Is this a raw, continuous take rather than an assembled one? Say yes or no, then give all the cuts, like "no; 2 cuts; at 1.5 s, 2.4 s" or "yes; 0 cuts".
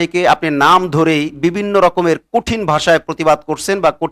yes; 0 cuts